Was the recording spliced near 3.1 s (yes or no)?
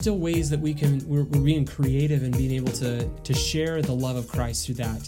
yes